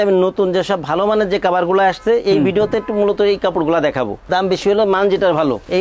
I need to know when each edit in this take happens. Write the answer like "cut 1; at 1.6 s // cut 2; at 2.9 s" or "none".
none